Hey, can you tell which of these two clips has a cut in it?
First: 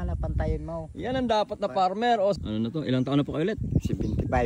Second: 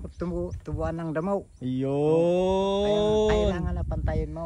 first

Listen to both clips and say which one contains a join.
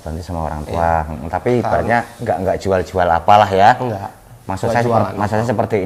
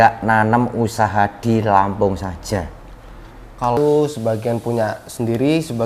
second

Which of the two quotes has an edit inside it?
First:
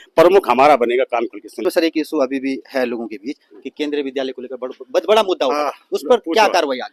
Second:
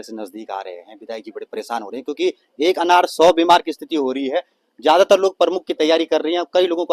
first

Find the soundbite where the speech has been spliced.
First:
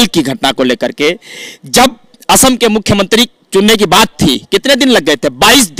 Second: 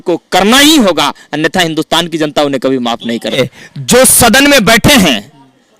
second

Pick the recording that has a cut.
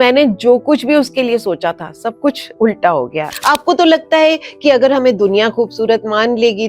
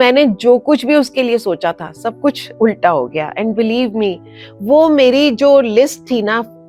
first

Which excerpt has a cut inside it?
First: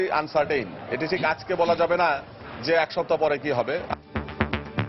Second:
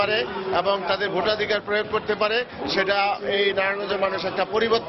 first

